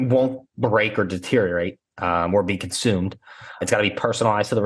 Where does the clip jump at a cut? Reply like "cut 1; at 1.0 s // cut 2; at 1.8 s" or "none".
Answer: cut 1; at 3.6 s